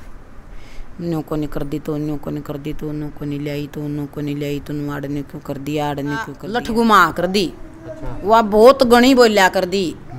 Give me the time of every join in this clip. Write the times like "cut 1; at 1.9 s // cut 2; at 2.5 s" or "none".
cut 1; at 6.5 s